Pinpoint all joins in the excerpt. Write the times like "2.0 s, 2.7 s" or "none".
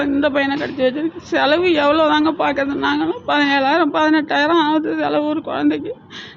none